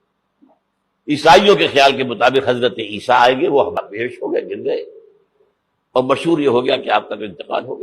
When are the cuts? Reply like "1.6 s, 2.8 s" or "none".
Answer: 3.8 s